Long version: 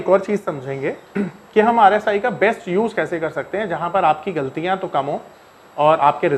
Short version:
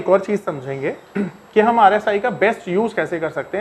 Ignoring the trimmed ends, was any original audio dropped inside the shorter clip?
no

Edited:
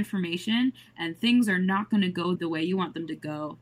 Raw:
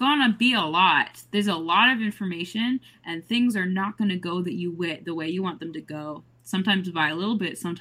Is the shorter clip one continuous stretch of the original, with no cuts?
no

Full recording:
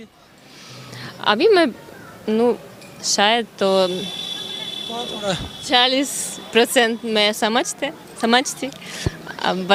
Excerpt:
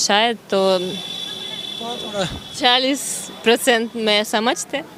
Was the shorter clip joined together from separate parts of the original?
no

